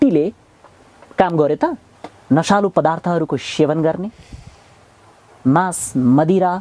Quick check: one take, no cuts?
no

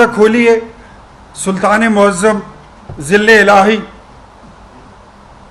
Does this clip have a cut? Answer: no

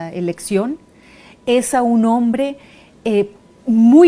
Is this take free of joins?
yes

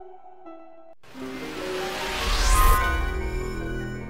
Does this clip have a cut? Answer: yes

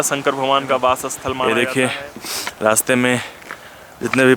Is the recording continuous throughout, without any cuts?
no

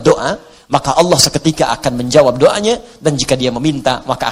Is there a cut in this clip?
no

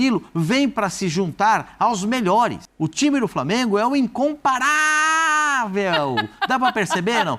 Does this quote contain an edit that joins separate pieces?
yes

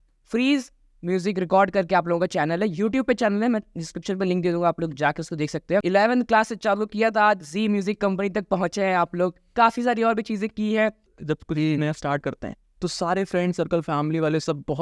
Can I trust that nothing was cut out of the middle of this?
no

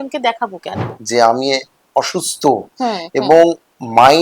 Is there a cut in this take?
yes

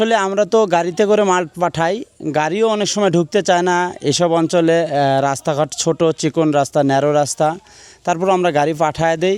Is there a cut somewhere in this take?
no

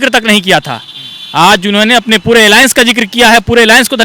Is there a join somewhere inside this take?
no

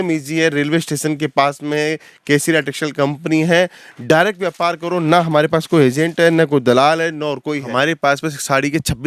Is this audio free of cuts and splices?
no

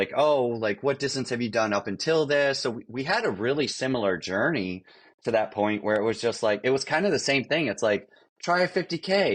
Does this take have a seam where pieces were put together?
no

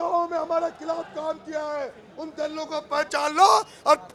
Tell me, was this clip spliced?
no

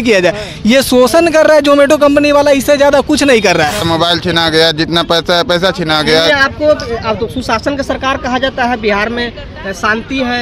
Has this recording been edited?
yes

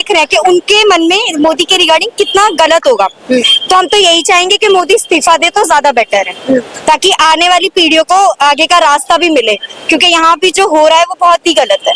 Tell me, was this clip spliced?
no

